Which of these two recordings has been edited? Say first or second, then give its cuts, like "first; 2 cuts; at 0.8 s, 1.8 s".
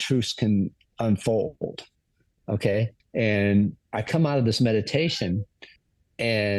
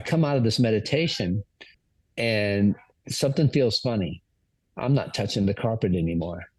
first; 1 cut; at 3.0 s